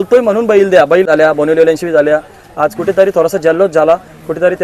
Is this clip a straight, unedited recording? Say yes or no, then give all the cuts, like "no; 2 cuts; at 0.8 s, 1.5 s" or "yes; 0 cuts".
no; 1 cut; at 1.1 s